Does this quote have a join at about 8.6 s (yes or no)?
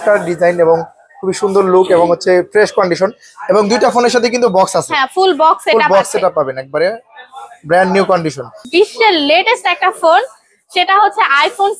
yes